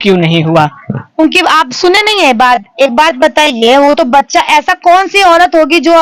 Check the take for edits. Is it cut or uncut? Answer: uncut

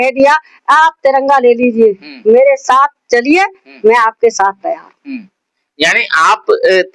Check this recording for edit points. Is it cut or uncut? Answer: uncut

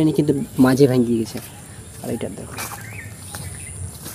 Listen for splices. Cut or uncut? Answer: uncut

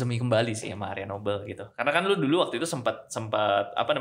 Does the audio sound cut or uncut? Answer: uncut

